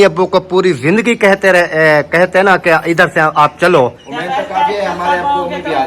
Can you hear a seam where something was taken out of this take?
yes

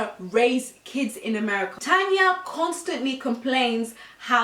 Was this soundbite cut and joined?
no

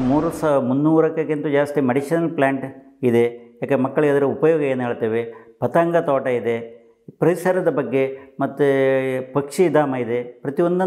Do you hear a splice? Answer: no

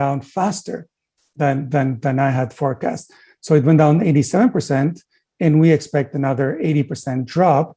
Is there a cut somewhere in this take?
no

